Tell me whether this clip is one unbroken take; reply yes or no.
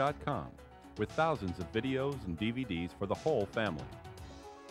no